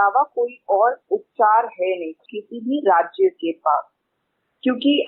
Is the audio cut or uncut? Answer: cut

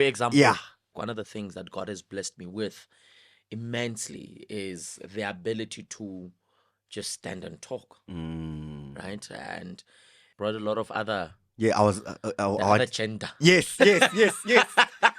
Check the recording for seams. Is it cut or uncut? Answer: cut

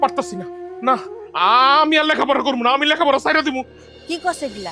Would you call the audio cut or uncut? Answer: cut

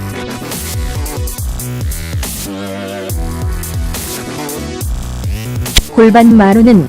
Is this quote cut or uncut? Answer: cut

